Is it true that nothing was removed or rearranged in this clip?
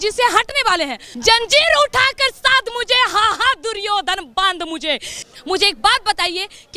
no; 2 cuts; at 1.0 s, 5.2 s

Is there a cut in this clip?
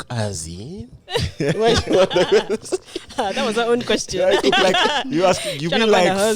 no; 0 cuts

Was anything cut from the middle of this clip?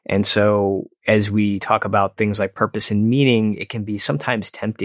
yes; 1 cut; at 0.9 s

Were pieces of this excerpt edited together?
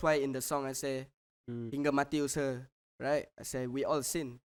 no; 0 cuts

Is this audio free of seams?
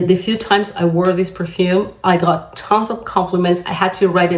yes; 0 cuts

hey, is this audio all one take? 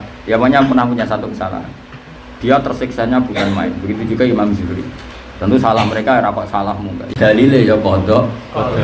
no; 1 cut; at 7.1 s

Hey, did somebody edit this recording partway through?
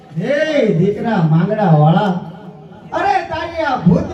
no; 0 cuts

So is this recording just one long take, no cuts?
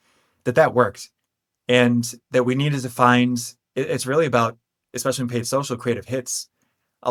yes; 0 cuts

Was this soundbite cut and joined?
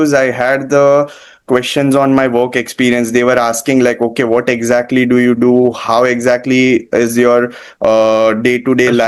no; 0 cuts

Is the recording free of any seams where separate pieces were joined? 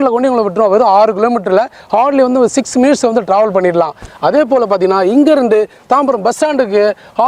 yes; 0 cuts

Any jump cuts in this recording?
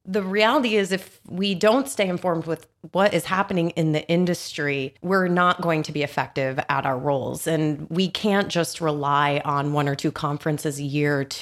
no; 0 cuts

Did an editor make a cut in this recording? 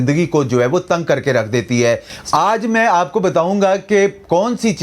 yes; 1 cut; at 2.2 s

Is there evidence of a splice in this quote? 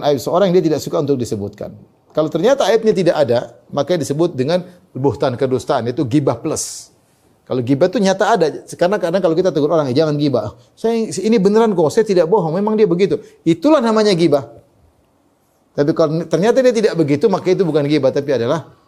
no; 0 cuts

